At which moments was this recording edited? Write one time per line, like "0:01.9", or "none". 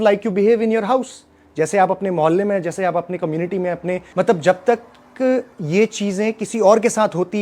0:04.0

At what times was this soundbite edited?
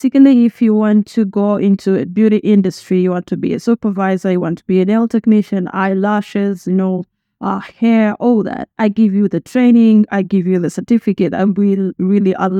none

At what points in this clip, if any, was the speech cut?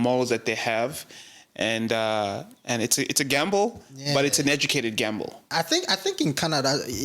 0:05.5

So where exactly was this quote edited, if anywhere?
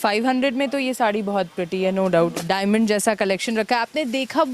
0:02.4

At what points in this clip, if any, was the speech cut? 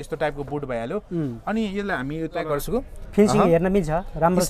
0:02.6

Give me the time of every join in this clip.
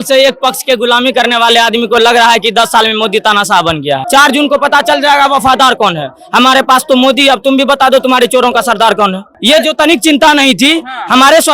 0:04.0
0:09.3

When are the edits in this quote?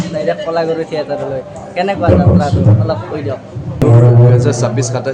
0:03.8

